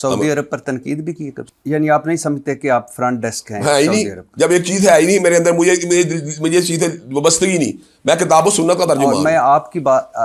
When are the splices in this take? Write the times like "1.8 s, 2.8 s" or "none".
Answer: 1.3 s